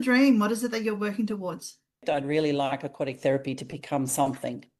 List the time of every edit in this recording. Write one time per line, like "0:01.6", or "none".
0:02.0